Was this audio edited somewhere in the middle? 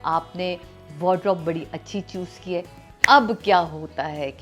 yes; 1 cut; at 2.8 s

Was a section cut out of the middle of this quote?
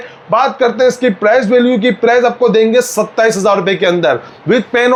no; 0 cuts

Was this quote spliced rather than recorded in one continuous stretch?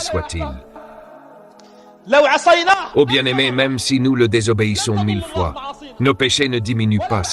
no; 0 cuts

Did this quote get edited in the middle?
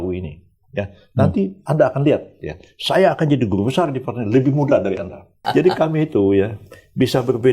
yes; 1 cut; at 5.4 s

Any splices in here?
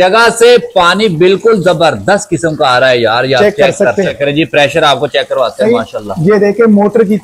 yes; 1 cut; at 4.2 s

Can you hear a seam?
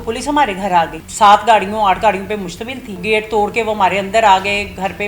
yes; 2 cuts; at 1.0 s, 3.0 s

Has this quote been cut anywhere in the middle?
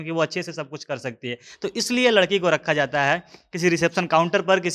no; 0 cuts

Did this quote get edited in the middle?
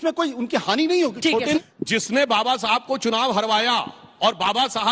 yes; 1 cut; at 1.6 s

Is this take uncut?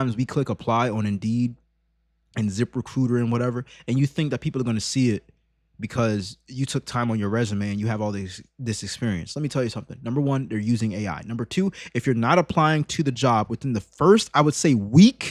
yes; 0 cuts

